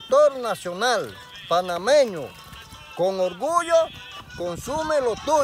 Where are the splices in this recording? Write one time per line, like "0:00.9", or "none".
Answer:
0:01.0